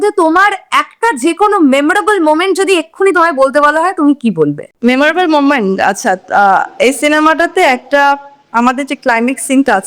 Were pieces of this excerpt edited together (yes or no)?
no